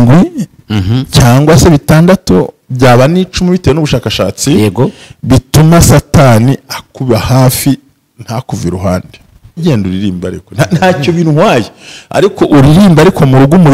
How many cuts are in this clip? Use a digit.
1